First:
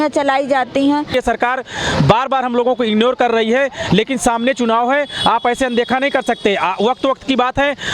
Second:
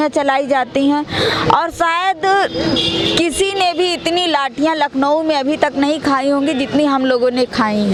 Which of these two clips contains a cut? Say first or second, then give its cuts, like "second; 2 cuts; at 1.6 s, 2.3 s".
first; 1 cut; at 1.1 s